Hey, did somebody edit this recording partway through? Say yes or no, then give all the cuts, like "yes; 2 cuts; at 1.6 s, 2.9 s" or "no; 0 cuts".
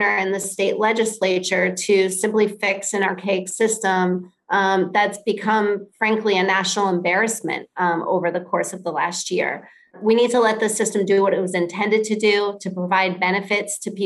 no; 0 cuts